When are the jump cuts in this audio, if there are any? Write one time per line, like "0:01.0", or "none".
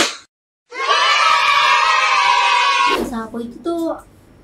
0:02.9